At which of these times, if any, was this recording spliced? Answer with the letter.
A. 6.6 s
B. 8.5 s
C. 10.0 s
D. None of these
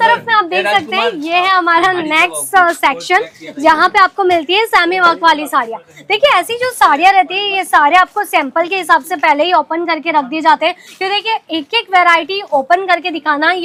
D